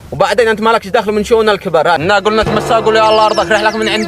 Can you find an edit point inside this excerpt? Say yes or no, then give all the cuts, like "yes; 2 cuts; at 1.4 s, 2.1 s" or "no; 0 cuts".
yes; 1 cut; at 2.0 s